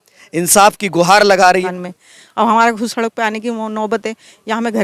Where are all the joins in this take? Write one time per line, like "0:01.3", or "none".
0:01.7